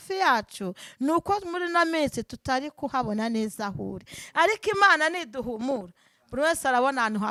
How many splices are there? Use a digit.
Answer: 0